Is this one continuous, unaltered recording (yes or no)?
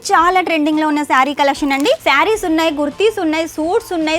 no